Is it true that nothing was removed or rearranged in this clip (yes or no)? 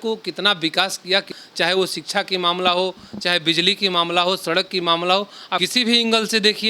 no